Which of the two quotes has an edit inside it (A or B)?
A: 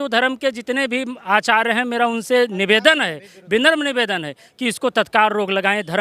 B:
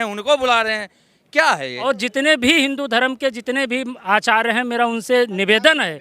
B